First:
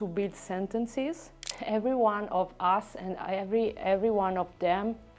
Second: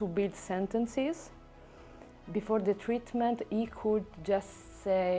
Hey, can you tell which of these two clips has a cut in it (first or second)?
first